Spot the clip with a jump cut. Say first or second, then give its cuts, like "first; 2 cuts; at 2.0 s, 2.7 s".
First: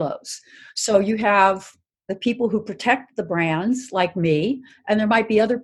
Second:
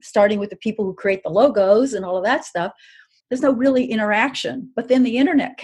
second; 1 cut; at 3.2 s